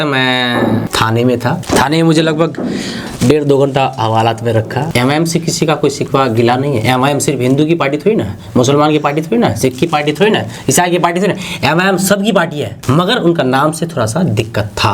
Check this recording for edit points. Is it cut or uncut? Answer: cut